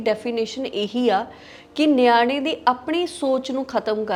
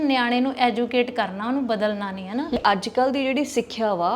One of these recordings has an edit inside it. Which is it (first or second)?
second